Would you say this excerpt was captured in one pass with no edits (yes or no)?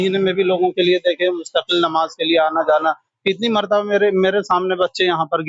yes